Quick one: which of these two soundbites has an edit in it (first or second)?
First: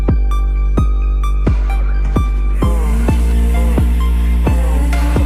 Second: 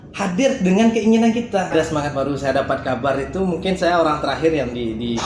second